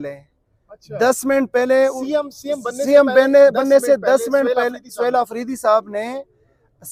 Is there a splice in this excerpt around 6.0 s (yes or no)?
no